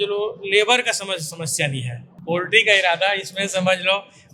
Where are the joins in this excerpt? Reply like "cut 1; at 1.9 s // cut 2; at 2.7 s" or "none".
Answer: cut 1; at 2.2 s